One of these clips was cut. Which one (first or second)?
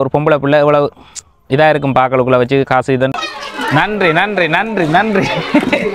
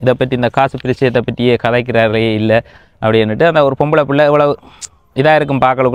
first